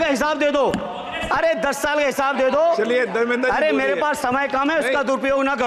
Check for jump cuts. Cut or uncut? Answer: uncut